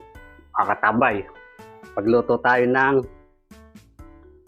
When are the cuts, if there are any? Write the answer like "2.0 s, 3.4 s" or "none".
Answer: 3.1 s